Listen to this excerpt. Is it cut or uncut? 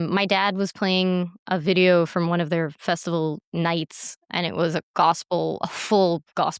cut